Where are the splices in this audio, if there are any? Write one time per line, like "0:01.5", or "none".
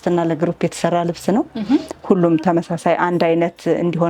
none